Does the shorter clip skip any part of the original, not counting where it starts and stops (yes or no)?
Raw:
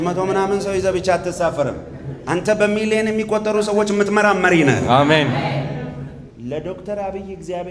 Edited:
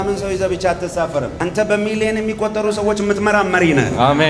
yes